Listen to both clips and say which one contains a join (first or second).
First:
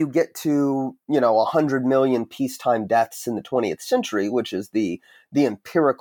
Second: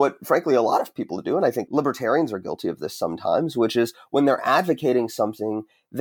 second